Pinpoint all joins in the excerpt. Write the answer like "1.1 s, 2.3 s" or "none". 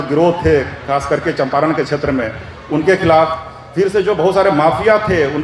none